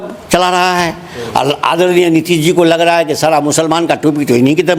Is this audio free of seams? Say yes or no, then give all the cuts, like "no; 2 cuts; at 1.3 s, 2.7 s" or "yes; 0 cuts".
yes; 0 cuts